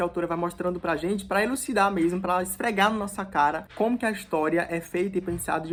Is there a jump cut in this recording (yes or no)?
no